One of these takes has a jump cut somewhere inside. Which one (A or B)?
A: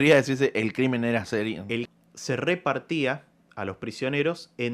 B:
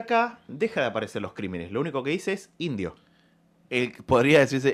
A